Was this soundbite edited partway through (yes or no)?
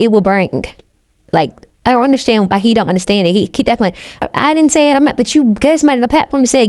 yes